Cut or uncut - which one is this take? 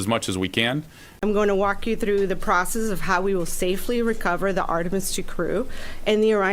cut